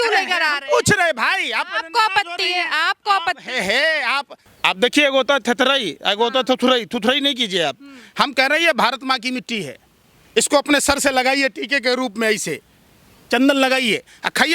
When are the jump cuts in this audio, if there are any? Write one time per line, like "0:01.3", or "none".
0:04.4